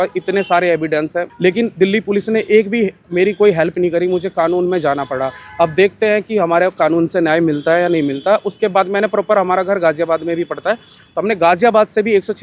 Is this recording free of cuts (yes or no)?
yes